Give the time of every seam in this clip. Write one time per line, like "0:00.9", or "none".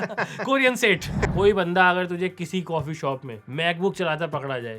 0:01.3